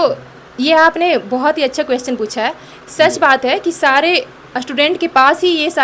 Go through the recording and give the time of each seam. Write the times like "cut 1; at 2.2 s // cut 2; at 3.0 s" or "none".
none